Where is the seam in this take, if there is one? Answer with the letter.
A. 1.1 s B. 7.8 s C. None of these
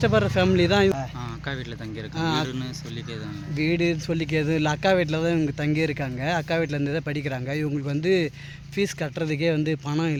C